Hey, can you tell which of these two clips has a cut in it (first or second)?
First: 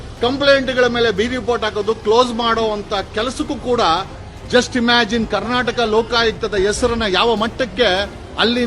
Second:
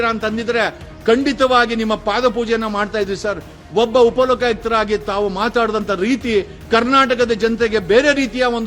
first